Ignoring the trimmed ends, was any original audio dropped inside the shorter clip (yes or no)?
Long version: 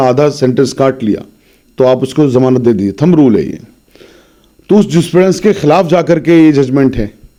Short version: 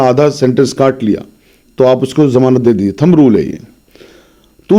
no